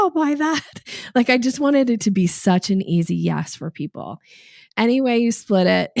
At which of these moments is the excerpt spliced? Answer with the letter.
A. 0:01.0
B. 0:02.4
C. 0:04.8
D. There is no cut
C